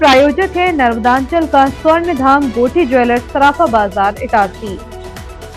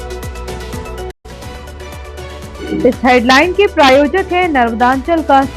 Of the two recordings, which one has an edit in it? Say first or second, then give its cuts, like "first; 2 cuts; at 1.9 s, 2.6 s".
second; 2 cuts; at 1.2 s, 2.6 s